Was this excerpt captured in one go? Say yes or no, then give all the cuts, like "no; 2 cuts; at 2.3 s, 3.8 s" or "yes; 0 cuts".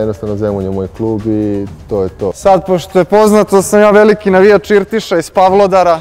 no; 1 cut; at 2.4 s